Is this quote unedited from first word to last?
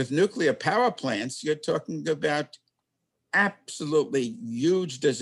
yes; 0 cuts

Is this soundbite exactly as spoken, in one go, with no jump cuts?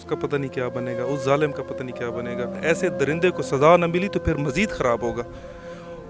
no; 1 cut; at 2.6 s

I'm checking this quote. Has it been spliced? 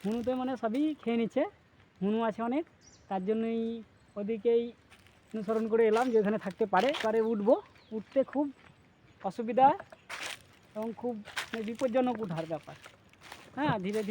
yes; 1 cut; at 7.0 s

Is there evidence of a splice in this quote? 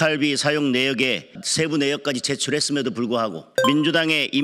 yes; 2 cuts; at 1.4 s, 3.5 s

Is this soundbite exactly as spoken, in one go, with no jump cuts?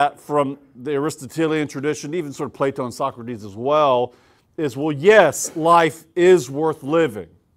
yes; 0 cuts

